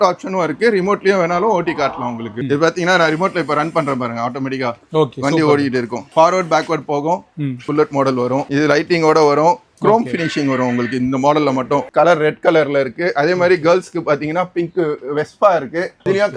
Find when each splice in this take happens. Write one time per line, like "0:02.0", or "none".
0:02.4
0:07.6
0:11.9